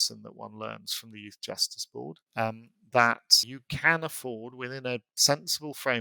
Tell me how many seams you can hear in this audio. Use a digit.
1